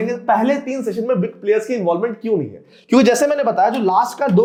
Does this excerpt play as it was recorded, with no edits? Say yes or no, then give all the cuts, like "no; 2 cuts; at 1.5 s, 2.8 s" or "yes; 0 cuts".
yes; 0 cuts